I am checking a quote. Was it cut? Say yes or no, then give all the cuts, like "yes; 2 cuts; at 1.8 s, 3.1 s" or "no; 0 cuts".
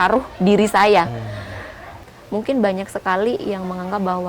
yes; 1 cut; at 2.0 s